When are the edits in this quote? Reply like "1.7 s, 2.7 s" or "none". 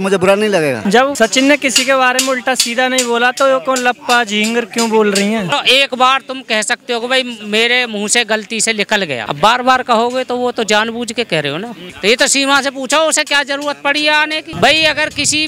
1.0 s, 5.5 s, 9.2 s, 11.9 s, 14.5 s